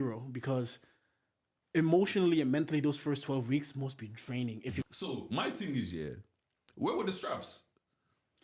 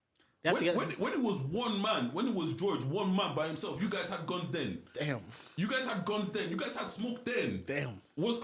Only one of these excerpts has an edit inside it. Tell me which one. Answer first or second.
first